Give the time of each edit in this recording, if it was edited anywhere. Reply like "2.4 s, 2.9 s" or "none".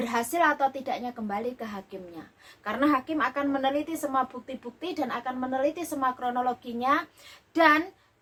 none

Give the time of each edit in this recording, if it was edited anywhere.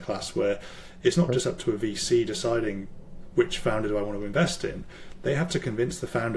none

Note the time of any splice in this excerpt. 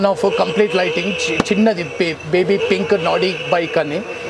none

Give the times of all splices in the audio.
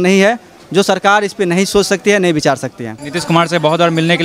2.9 s

